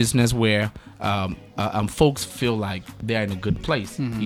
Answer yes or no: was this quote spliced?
yes